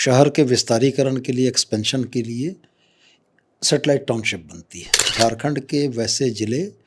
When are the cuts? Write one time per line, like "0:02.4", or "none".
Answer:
0:05.0

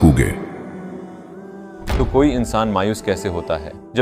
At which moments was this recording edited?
0:01.9

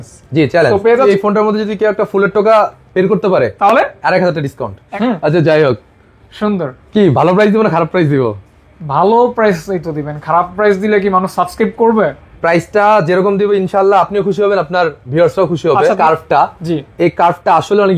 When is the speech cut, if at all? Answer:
0:01.0
0:04.8
0:12.3
0:16.0

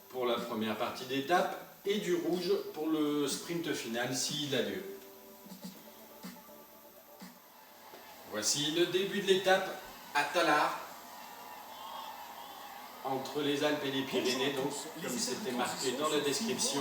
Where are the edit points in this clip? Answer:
0:15.3

